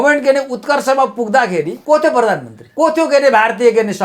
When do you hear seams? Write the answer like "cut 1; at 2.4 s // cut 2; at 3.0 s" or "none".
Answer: cut 1; at 1.8 s // cut 2; at 2.6 s